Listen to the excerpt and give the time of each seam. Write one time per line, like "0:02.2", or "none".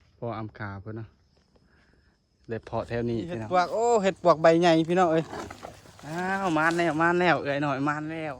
0:03.4